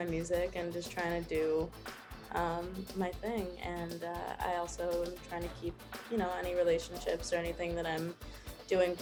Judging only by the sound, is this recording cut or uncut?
uncut